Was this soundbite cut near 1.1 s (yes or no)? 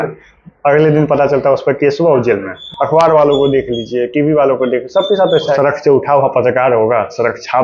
no